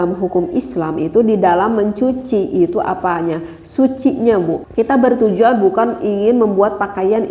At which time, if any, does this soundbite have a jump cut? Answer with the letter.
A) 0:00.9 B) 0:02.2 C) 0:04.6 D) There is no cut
C